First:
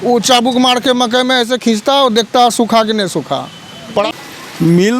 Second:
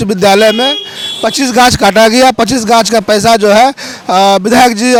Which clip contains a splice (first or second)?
first